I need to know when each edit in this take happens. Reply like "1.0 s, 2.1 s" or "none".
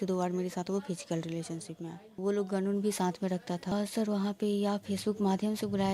2.2 s, 3.7 s